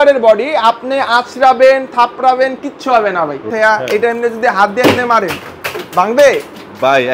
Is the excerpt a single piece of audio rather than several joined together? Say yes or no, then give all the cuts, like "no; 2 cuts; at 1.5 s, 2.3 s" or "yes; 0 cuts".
no; 1 cut; at 3.5 s